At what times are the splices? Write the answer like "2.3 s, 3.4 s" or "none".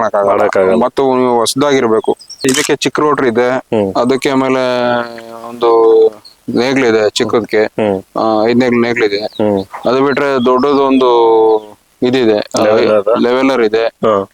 2.4 s